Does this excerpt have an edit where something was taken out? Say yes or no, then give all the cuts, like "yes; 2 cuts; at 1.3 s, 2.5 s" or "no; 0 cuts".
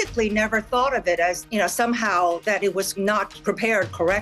yes; 2 cuts; at 1.4 s, 2.9 s